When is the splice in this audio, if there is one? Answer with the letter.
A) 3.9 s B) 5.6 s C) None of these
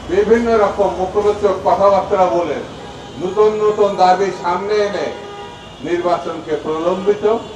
C